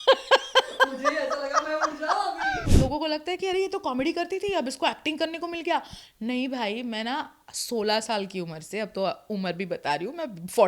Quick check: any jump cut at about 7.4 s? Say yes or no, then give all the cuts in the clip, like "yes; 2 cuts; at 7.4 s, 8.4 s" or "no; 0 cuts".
no; 1 cut; at 2.6 s